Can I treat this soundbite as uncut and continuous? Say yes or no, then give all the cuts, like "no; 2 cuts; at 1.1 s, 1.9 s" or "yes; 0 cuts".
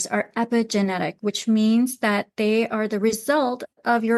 yes; 0 cuts